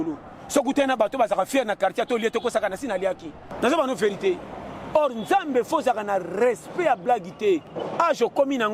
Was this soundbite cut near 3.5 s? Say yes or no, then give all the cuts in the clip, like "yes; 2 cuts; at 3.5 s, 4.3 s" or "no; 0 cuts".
yes; 2 cuts; at 3.5 s, 7.8 s